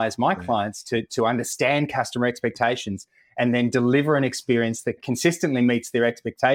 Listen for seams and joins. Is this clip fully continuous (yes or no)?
no